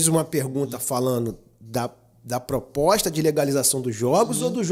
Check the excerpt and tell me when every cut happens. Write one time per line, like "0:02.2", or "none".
none